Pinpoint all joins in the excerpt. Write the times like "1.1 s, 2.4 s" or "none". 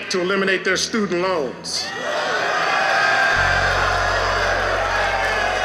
none